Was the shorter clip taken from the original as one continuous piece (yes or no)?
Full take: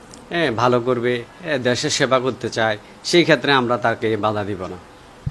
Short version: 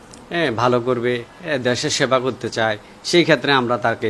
yes